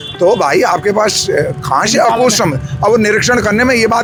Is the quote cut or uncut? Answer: uncut